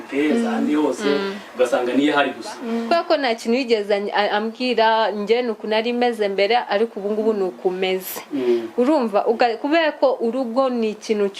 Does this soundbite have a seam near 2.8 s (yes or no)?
yes